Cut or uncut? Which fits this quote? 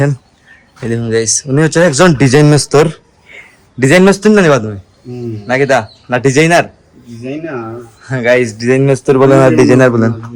uncut